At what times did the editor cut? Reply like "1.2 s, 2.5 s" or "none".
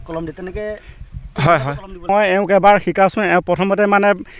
2.0 s